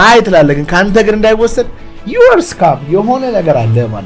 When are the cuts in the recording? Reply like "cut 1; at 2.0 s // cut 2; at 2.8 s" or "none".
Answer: none